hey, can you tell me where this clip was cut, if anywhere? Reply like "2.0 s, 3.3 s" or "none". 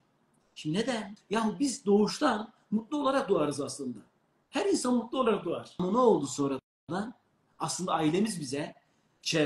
1.1 s, 5.7 s